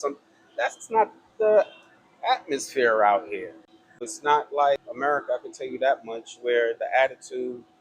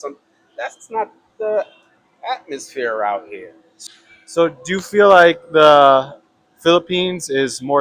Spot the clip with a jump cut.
first; 2 cuts; at 4.1 s, 4.9 s

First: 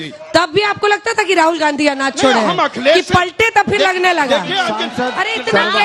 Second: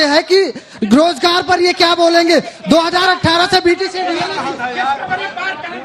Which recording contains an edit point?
first; 1 cut; at 4.8 s

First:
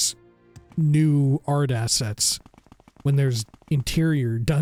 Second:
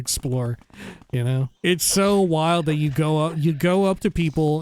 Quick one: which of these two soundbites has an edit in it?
second; 1 cut; at 1.6 s

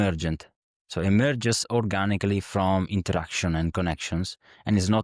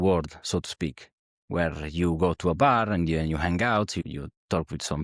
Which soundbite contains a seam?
second; 1 cut; at 4.0 s

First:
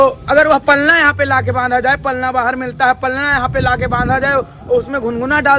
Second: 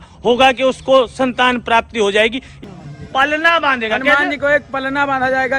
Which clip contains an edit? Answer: second; 1 cut; at 2.6 s

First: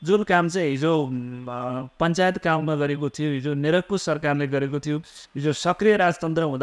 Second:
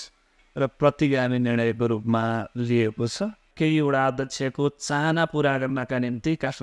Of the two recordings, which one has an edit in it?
second; 1 cut; at 3.4 s

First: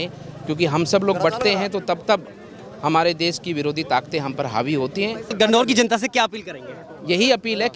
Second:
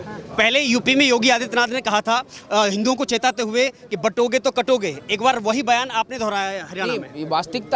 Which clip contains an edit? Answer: first; 1 cut; at 5.3 s

